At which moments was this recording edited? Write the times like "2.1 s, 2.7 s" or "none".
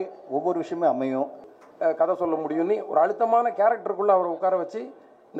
1.4 s